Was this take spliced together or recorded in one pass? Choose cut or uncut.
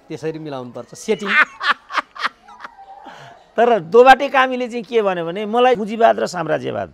cut